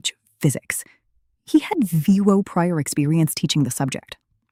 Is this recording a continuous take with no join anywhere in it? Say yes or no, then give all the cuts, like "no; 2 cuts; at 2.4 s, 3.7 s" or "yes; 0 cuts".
yes; 0 cuts